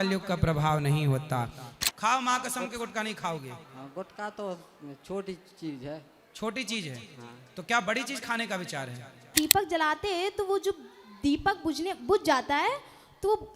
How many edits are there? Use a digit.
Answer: 2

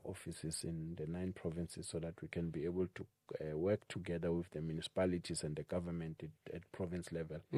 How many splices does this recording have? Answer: 0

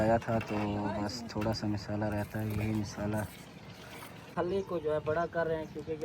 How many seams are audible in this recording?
1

